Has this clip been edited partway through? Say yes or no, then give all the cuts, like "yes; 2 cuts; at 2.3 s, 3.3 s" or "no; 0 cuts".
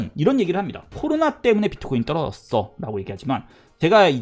no; 0 cuts